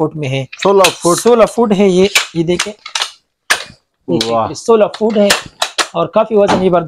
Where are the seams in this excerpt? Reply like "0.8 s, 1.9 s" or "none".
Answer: none